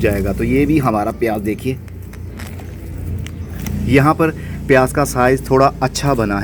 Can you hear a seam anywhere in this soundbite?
no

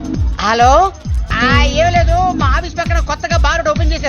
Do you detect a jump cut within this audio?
yes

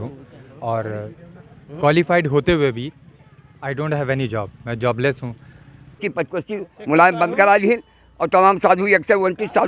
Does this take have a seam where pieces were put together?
yes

